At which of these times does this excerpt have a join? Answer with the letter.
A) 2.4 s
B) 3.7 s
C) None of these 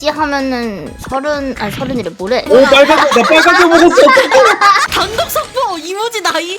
A